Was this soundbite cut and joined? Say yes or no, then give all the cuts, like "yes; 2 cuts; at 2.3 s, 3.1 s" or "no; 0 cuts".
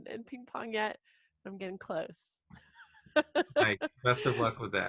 no; 0 cuts